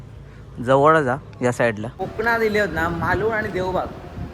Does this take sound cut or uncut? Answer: cut